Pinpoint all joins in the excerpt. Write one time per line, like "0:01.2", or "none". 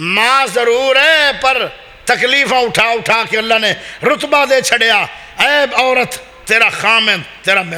none